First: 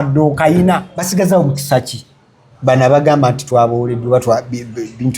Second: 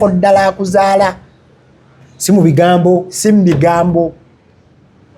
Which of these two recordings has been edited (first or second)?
first